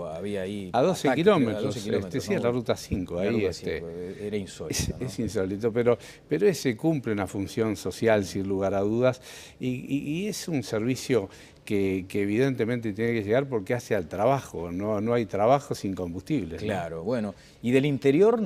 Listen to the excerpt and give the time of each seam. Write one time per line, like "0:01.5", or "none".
0:02.6